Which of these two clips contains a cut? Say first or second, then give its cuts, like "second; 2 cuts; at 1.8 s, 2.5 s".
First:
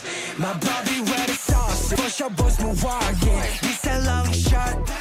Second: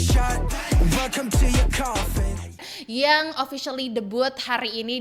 second; 1 cut; at 2.7 s